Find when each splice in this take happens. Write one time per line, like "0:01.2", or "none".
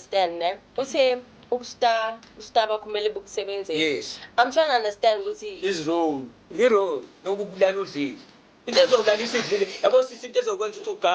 none

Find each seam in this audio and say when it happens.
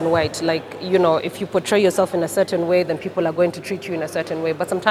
none

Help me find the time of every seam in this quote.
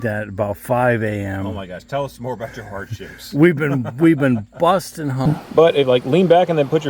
0:05.3

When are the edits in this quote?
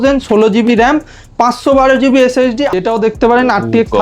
0:02.7

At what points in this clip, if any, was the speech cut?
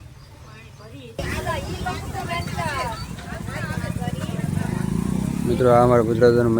0:01.2

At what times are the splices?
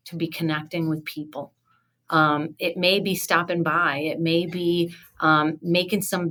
none

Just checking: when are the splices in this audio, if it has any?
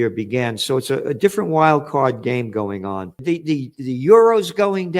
0:03.2

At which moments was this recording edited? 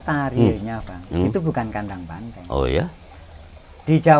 none

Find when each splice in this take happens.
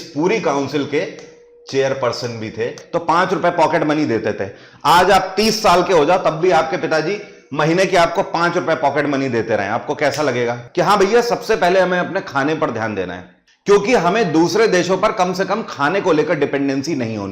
0:02.8
0:10.6

